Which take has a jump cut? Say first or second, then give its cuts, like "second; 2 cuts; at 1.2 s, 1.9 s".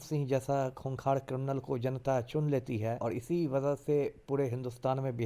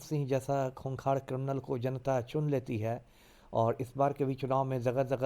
first; 1 cut; at 3.0 s